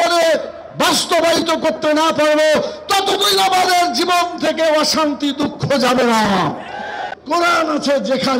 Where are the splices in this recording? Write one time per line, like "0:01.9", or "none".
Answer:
0:07.0

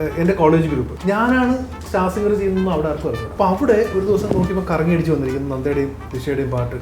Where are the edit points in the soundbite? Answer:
0:00.9
0:03.2

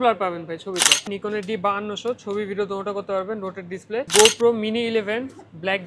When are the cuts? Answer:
0:01.1
0:04.1

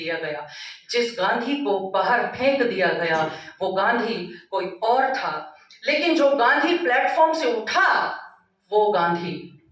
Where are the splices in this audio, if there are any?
none

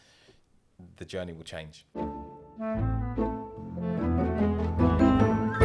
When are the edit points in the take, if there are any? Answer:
0:01.9

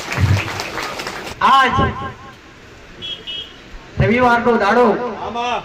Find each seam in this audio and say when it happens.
0:01.3

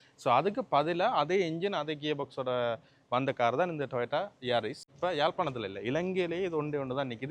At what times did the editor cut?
0:04.8

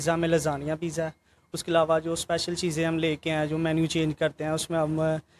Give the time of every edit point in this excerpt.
none

